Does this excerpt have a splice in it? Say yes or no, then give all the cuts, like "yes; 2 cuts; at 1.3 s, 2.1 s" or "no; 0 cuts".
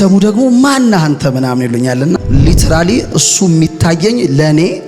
yes; 1 cut; at 2.2 s